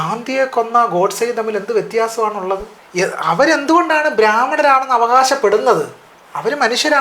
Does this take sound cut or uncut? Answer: cut